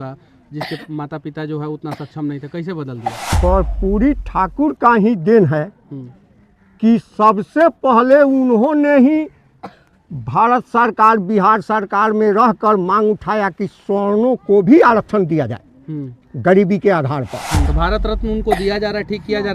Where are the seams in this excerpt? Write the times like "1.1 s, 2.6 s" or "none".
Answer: 3.3 s, 17.7 s